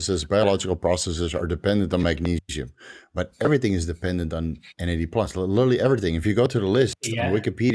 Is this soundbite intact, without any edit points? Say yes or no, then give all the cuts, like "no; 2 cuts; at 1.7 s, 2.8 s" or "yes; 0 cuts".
yes; 0 cuts